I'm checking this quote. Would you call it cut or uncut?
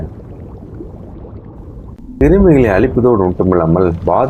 cut